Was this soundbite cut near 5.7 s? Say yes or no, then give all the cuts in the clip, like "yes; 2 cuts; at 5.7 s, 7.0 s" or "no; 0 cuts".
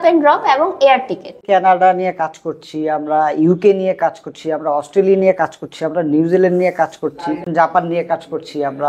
no; 2 cuts; at 1.4 s, 7.4 s